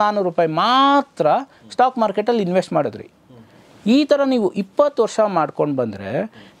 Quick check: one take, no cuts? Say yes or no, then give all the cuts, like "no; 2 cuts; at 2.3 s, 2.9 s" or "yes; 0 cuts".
yes; 0 cuts